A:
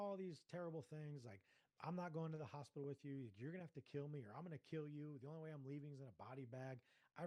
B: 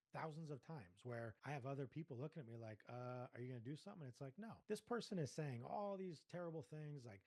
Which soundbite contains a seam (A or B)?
B